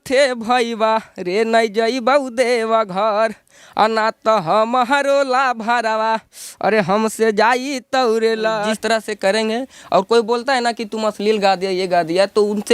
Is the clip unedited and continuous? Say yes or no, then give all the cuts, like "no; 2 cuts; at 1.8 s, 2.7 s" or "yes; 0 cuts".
no; 1 cut; at 8.8 s